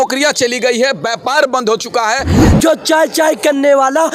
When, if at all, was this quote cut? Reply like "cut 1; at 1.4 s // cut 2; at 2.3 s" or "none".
cut 1; at 2.4 s